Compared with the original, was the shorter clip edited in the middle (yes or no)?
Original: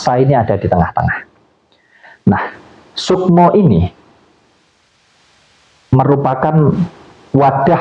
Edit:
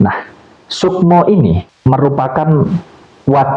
yes